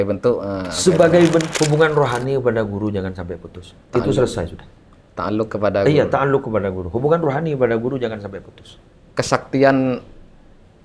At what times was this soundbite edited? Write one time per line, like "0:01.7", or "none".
0:01.5